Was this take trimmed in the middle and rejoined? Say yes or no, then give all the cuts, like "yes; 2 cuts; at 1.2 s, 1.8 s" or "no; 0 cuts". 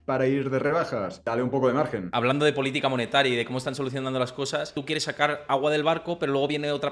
yes; 3 cuts; at 1.2 s, 2.1 s, 4.8 s